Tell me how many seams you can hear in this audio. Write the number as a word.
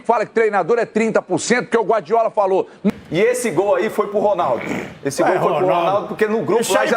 one